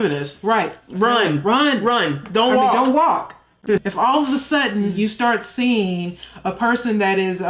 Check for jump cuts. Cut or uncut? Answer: cut